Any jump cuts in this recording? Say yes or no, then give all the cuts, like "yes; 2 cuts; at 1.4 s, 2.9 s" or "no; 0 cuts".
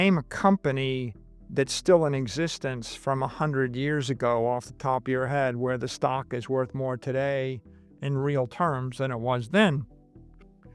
no; 0 cuts